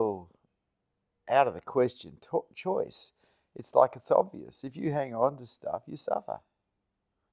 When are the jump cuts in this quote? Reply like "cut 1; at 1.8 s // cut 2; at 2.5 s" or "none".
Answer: none